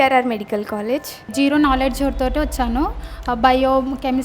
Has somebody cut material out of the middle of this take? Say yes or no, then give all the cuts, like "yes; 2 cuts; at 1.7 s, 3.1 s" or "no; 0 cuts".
yes; 1 cut; at 1.3 s